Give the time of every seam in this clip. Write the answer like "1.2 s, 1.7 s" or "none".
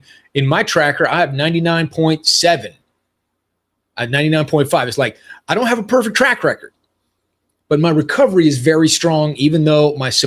none